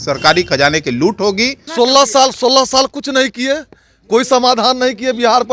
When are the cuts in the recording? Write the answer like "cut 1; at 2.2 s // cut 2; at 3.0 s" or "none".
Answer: cut 1; at 1.6 s